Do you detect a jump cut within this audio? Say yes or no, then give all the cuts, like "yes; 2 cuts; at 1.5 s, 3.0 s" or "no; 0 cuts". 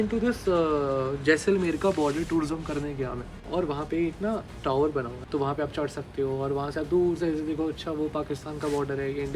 yes; 3 cuts; at 3.4 s, 4.5 s, 5.2 s